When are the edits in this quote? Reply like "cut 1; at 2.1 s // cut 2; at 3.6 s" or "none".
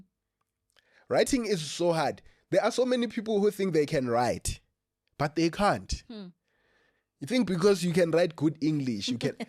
none